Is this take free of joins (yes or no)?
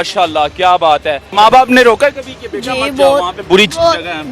no